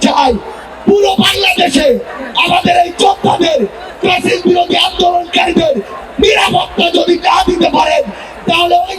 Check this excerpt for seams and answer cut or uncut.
uncut